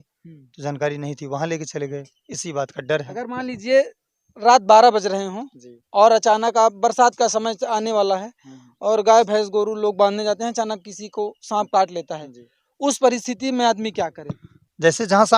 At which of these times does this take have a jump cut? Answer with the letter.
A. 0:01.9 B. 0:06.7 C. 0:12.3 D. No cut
D